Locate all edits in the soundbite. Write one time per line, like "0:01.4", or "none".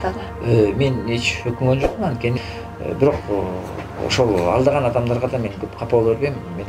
0:02.4